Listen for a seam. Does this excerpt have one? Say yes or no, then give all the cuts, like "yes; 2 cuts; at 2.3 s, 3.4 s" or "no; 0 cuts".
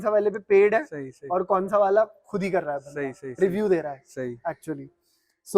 no; 0 cuts